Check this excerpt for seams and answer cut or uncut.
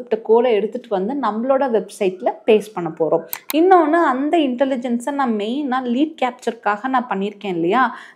uncut